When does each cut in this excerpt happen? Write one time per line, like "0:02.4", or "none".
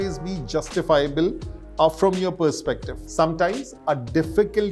0:02.9